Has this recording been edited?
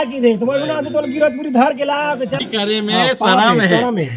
yes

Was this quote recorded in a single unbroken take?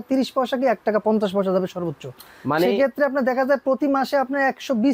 yes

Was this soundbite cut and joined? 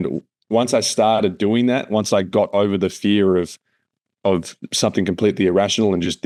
no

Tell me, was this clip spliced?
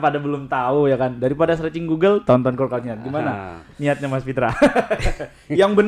no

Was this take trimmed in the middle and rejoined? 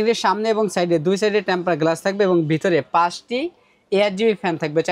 no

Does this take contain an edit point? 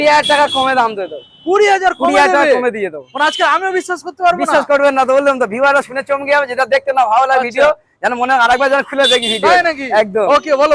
no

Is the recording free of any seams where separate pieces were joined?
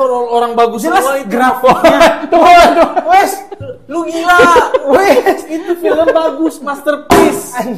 yes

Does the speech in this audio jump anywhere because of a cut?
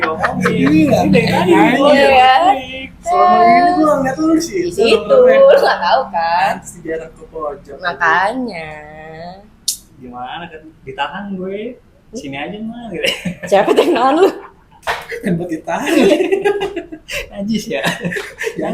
no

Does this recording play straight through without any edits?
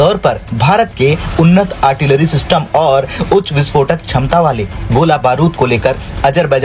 yes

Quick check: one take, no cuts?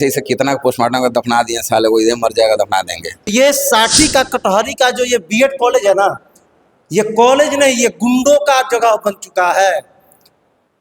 no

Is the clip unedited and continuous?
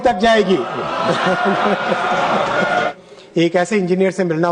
no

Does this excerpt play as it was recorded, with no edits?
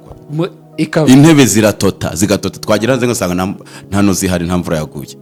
yes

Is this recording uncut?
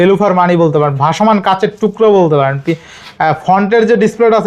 yes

